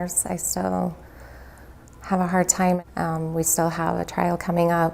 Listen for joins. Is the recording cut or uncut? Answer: cut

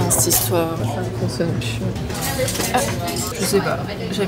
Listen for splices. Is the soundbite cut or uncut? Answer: uncut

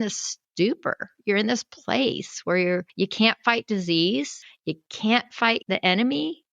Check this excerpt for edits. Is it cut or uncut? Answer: cut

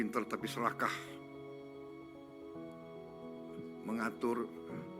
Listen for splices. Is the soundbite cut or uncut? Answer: cut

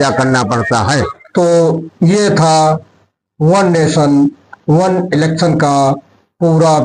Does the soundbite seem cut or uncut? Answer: uncut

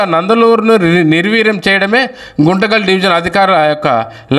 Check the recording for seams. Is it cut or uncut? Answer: uncut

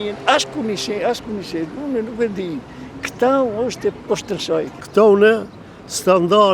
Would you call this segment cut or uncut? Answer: cut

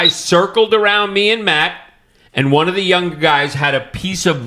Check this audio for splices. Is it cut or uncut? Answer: uncut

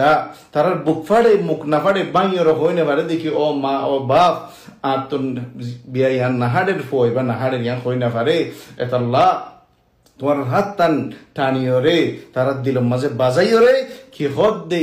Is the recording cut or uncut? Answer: cut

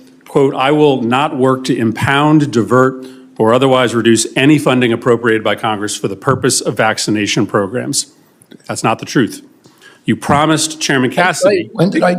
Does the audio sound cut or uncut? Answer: cut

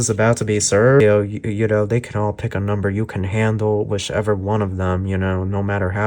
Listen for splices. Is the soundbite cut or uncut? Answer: cut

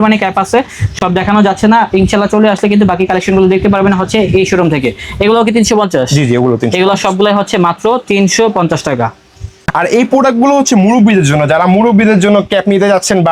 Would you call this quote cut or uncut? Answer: uncut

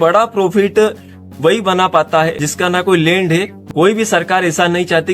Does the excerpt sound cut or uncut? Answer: cut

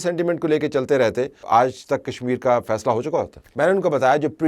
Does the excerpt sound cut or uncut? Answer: cut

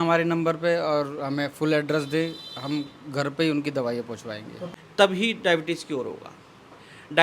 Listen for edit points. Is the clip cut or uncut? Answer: cut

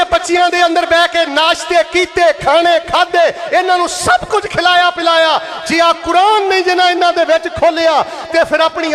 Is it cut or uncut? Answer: uncut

